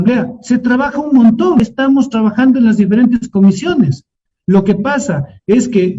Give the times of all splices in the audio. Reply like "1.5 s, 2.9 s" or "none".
1.6 s